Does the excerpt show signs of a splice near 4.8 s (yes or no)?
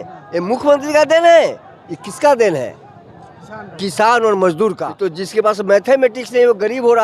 yes